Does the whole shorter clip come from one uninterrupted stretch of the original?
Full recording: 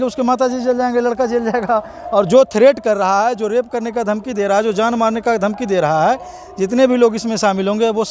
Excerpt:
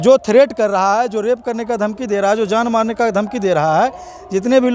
yes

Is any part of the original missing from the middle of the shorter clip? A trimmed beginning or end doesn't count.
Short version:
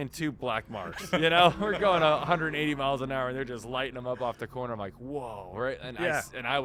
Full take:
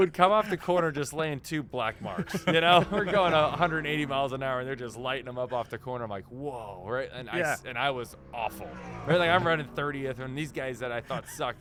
no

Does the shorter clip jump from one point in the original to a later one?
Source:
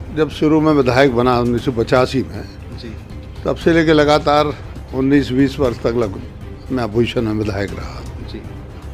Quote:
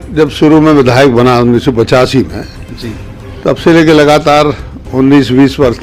no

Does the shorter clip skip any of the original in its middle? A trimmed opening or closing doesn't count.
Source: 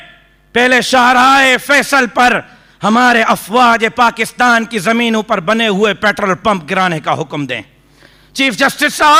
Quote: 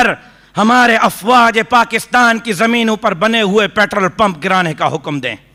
no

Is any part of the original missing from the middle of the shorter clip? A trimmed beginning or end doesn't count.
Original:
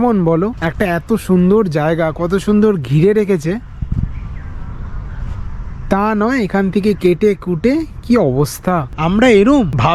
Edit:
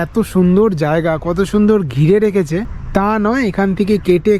yes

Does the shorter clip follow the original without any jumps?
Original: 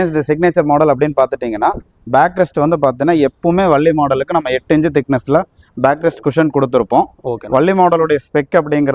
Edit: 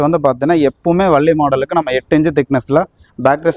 yes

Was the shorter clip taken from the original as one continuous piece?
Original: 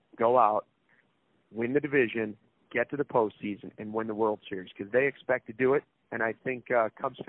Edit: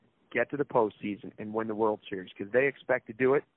yes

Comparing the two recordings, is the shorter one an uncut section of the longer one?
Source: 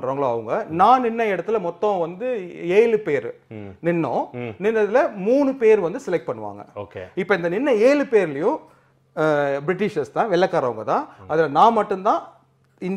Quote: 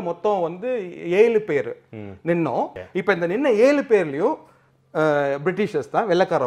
no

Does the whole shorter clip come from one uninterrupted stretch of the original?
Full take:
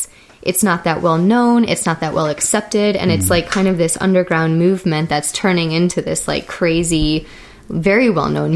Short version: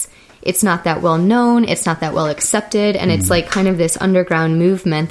yes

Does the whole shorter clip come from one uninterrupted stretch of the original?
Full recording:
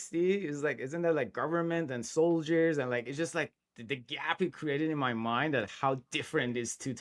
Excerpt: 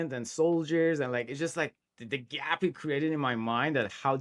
yes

